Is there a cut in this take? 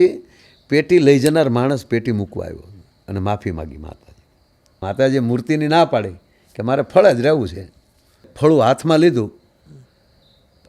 yes; 2 cuts; at 4.8 s, 8.3 s

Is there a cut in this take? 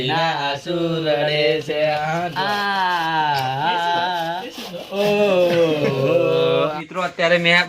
yes; 1 cut; at 6.5 s

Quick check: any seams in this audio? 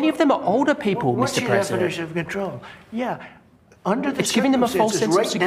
no; 0 cuts

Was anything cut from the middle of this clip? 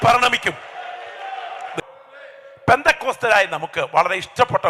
yes; 1 cut; at 1.8 s

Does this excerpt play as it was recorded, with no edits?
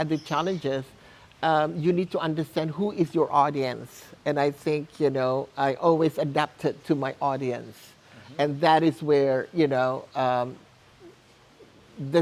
yes; 0 cuts

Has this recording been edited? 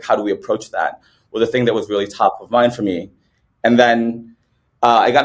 no; 0 cuts

